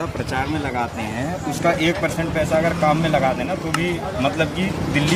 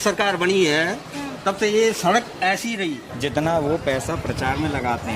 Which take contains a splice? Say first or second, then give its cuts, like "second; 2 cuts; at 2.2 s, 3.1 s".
second; 1 cut; at 3.1 s